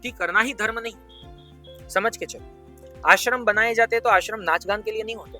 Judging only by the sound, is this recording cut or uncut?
uncut